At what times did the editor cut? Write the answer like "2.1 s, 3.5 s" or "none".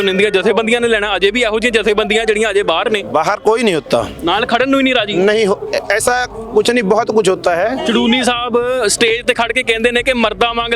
3.0 s